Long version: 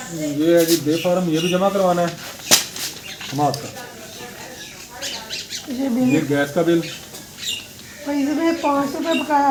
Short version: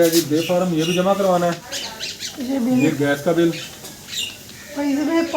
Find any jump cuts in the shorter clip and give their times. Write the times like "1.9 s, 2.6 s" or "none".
1.7 s